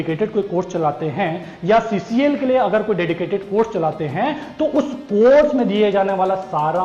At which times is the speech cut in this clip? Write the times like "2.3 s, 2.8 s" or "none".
none